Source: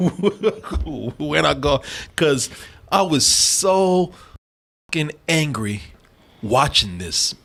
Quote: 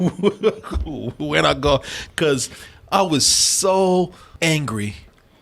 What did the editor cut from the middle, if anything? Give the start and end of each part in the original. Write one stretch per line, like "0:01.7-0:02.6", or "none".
0:04.3-0:05.2